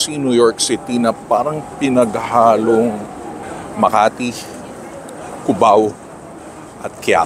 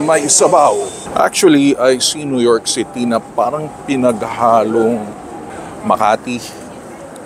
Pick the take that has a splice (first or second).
second